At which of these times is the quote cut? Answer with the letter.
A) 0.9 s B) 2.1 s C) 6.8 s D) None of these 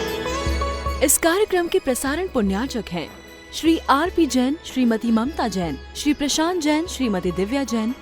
A